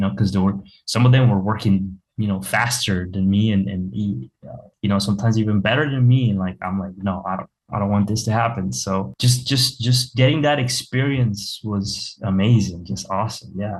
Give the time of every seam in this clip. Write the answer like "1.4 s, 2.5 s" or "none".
none